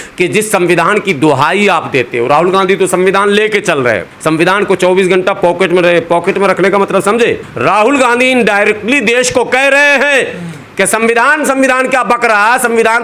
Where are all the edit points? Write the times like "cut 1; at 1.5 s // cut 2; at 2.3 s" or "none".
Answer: cut 1; at 7.5 s